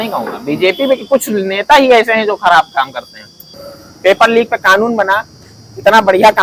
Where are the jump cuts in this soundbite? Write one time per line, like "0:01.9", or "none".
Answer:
0:03.5